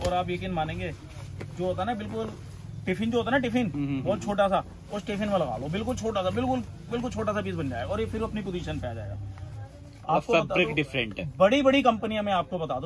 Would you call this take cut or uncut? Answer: uncut